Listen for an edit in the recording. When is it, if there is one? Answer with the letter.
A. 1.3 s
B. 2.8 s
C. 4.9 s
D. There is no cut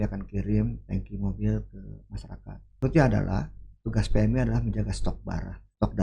B